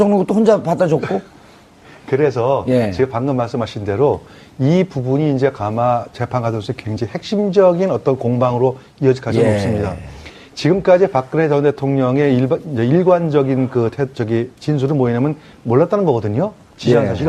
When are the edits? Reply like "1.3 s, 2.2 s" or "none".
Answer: 6.4 s